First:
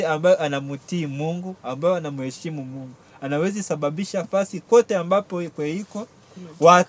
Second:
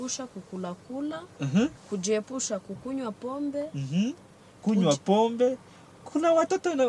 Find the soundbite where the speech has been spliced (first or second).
second